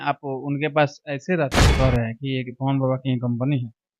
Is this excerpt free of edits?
no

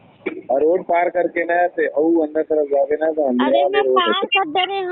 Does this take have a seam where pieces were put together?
no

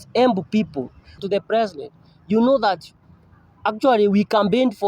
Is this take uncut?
no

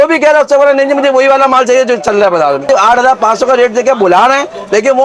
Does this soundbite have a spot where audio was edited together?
yes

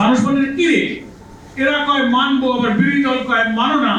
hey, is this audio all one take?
yes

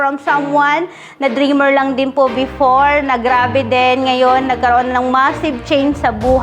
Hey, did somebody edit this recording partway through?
no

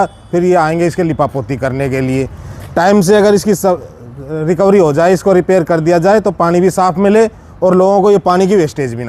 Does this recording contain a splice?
no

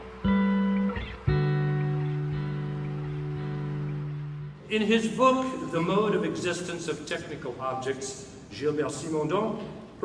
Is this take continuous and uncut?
yes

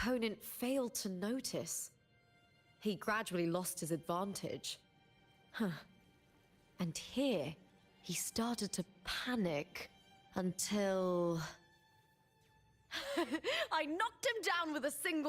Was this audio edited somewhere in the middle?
no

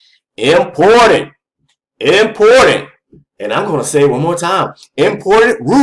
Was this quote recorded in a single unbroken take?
yes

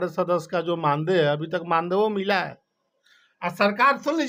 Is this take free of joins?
yes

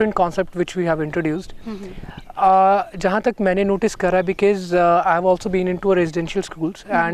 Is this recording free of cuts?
yes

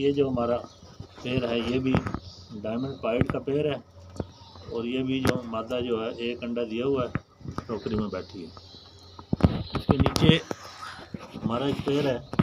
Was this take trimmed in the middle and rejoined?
no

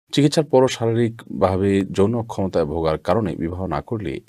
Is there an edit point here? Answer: no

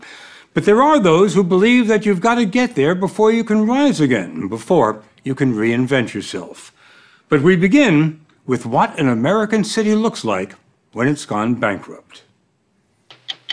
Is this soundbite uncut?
yes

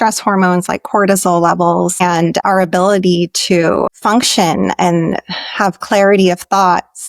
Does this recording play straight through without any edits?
no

